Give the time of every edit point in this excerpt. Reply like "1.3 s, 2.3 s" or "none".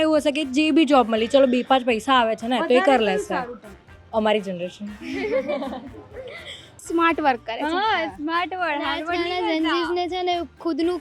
6.8 s

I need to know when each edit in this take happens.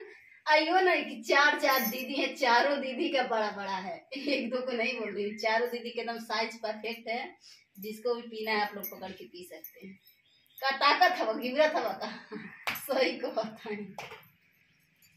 none

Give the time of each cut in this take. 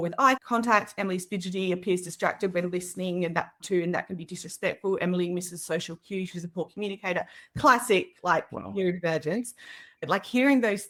none

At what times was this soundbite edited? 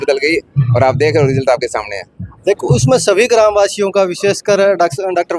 2.3 s

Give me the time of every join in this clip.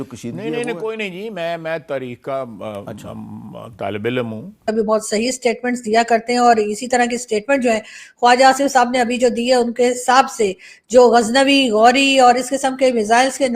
4.7 s

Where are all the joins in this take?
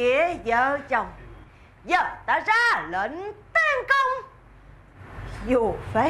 none

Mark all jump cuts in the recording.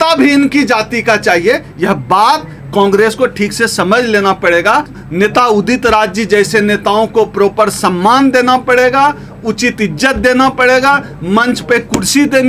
5.0 s

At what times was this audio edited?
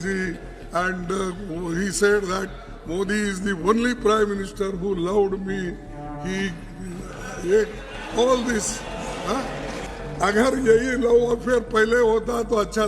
9.9 s

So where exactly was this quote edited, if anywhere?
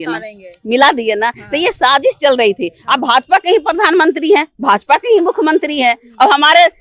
none

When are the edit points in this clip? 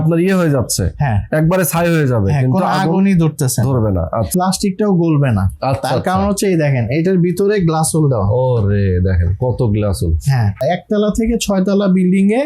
4.3 s, 10.6 s

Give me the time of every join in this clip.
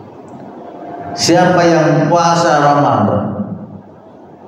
none

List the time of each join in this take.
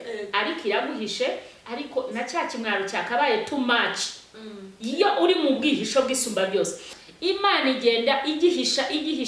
6.9 s

